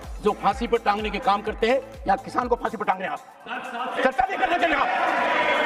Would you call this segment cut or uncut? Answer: uncut